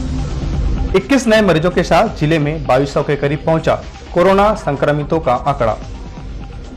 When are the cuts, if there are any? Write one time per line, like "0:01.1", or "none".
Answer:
0:00.9